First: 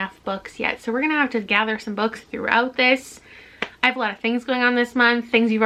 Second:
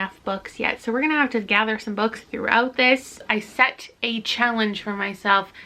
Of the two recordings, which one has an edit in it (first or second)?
second